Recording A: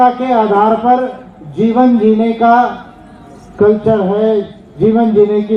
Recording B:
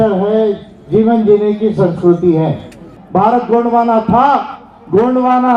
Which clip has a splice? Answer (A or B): B